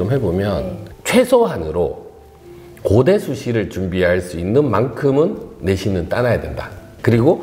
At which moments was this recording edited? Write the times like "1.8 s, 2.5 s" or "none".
0.9 s